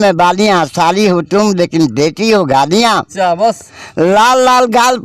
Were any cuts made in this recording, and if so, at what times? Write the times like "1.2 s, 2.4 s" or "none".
none